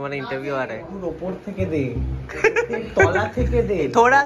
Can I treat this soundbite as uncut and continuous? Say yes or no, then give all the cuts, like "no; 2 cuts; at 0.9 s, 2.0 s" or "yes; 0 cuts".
no; 1 cut; at 1.0 s